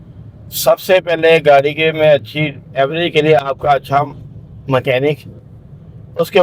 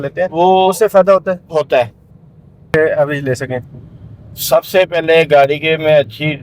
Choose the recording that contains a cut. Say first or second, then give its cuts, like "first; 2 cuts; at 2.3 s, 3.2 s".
second; 1 cut; at 2.6 s